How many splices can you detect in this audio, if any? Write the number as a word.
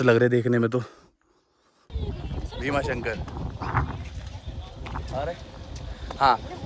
one